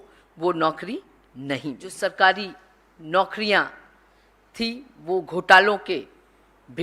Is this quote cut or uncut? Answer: cut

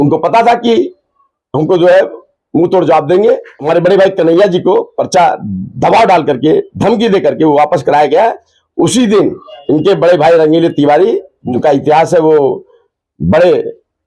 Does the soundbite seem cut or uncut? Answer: cut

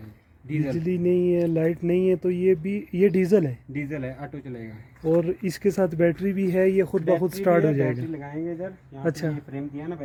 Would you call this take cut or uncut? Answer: uncut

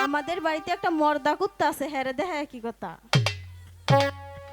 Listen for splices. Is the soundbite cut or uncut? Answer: uncut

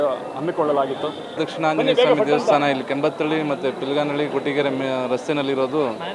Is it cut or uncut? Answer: cut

